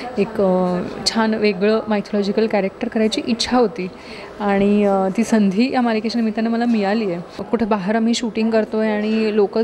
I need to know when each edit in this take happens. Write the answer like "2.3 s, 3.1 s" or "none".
7.4 s